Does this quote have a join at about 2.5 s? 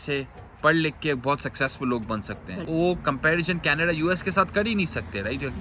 yes; 1 cut; at 2.5 s

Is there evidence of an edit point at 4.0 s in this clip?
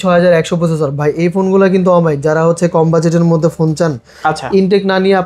no; 0 cuts

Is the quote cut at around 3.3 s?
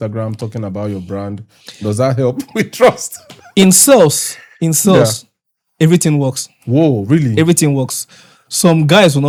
no; 0 cuts

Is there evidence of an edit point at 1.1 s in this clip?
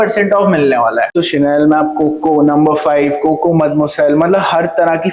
yes; 1 cut; at 1.1 s

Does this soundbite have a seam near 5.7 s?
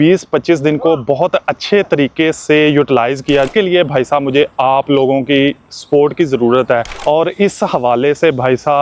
no; 2 cuts; at 3.5 s, 6.9 s

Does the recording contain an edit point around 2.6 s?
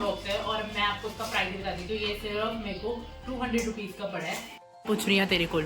no; 1 cut; at 4.5 s

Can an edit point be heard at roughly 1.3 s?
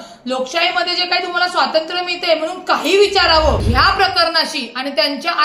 no; 1 cut; at 3.6 s

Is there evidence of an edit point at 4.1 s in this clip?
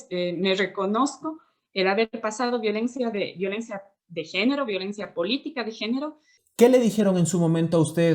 no; 1 cut; at 6.5 s

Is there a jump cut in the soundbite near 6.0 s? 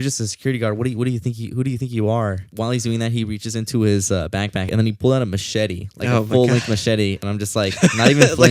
no; 3 cuts; at 2.5 s, 4.7 s, 7.2 s

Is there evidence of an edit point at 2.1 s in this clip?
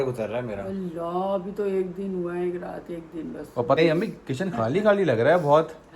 no; 1 cut; at 3.8 s

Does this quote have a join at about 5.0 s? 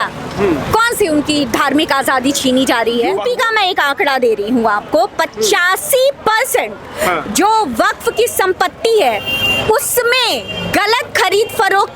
no; 1 cut; at 3.2 s

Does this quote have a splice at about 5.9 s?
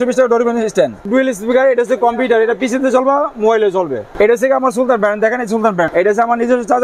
yes; 3 cuts; at 1.0 s, 4.0 s, 5.9 s

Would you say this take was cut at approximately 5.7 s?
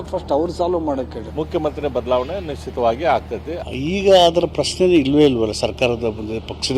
no; 2 cuts; at 1.2 s, 3.6 s

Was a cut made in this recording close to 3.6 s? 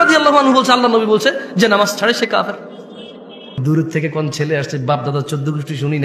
yes; 1 cut; at 3.6 s

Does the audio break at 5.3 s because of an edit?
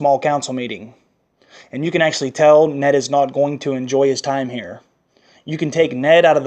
no; 1 cut; at 3.3 s

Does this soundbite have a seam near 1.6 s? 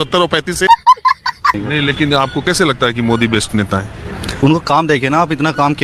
yes; 1 cut; at 1.6 s

